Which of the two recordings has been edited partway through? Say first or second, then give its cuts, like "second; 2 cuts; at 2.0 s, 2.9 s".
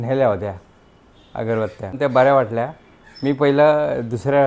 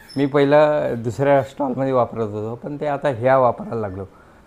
first; 1 cut; at 2.0 s